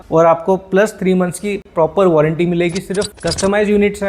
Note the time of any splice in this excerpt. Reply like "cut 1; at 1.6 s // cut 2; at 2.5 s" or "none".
cut 1; at 3.1 s